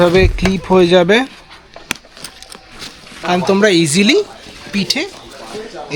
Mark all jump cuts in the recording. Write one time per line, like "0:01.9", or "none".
0:03.2